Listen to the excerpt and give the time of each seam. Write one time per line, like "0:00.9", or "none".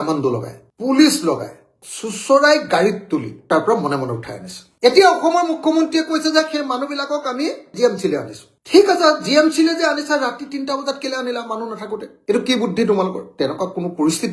0:01.7
0:03.4
0:13.2